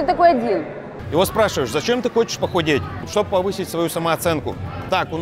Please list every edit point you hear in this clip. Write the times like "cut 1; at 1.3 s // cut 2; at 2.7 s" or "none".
cut 1; at 0.9 s // cut 2; at 3.1 s